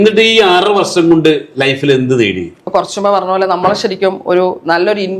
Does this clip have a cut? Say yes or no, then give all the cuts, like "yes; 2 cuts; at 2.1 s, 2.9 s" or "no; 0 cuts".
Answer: yes; 1 cut; at 2.6 s